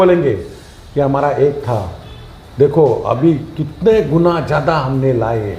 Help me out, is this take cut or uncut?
uncut